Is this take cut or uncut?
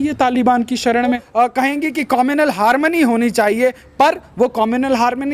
cut